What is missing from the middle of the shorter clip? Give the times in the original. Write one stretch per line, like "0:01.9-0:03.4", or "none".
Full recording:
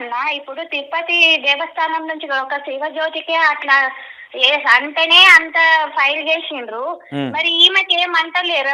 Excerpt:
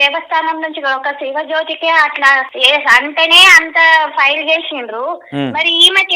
0:04.0-0:04.3